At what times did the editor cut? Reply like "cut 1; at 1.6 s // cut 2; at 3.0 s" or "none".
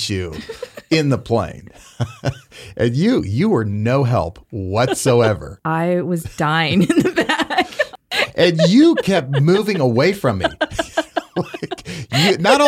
cut 1; at 5.5 s // cut 2; at 7.9 s